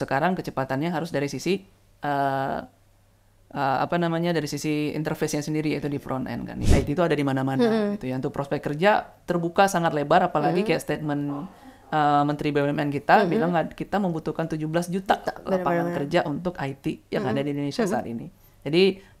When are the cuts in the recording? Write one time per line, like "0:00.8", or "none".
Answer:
0:06.6